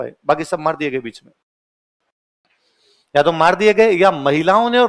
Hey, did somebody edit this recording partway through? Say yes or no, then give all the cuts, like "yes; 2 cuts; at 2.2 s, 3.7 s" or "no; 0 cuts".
no; 0 cuts